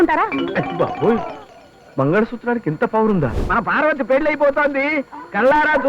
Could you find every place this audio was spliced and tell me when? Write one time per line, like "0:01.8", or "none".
0:03.4